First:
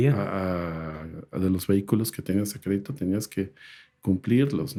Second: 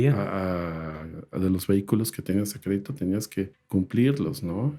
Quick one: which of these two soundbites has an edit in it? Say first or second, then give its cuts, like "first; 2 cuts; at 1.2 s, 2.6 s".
second; 1 cut; at 3.6 s